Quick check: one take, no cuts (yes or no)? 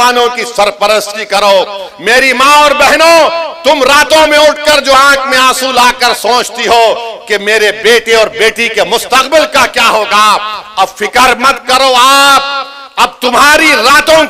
yes